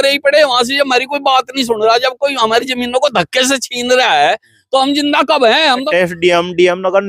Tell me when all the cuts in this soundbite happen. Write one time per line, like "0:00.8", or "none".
0:05.9